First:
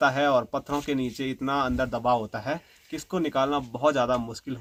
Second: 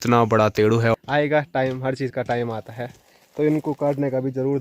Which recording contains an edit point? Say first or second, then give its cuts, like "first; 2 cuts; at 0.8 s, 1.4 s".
second; 1 cut; at 0.9 s